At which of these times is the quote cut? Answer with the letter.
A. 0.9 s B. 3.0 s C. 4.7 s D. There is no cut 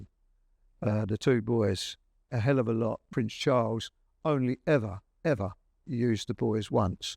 B